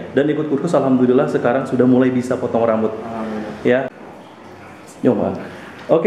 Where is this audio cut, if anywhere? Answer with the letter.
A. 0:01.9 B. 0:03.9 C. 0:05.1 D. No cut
B